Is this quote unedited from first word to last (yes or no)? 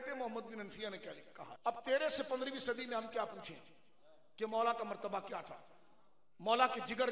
yes